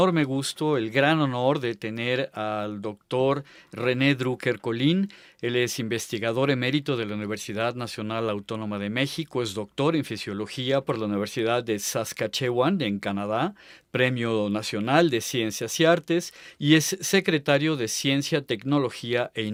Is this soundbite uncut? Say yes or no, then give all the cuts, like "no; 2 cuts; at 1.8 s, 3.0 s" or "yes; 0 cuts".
yes; 0 cuts